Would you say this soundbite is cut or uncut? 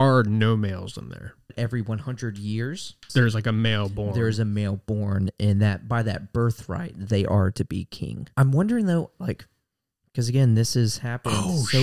cut